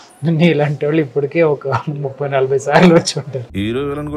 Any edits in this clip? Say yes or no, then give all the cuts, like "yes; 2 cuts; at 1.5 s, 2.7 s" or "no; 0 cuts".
no; 0 cuts